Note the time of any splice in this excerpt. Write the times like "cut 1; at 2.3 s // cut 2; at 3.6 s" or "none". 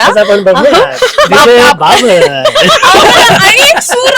none